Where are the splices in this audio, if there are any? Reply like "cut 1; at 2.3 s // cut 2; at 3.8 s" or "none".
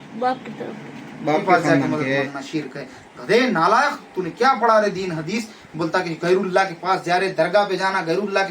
cut 1; at 2.4 s

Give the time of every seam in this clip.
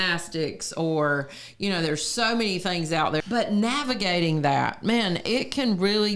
cut 1; at 3.2 s

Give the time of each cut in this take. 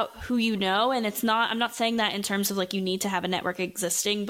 none

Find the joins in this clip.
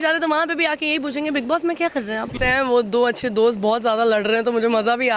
cut 1; at 2.3 s

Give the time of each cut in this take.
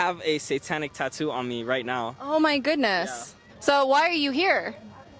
cut 1; at 3.5 s

